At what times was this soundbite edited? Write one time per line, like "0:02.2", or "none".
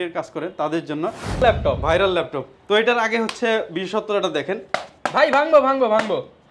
0:01.4